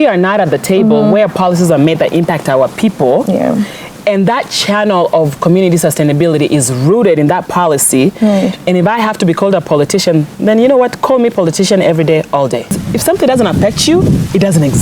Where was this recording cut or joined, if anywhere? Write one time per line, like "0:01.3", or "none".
0:12.8